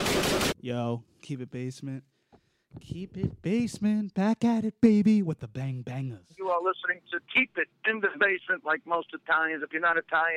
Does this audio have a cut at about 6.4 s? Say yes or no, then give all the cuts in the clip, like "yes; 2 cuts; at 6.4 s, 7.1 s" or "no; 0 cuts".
yes; 1 cut; at 6.4 s